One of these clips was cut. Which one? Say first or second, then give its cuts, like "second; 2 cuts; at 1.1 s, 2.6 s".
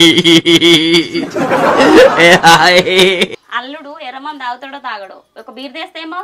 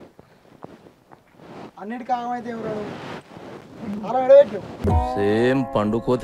first; 1 cut; at 3.4 s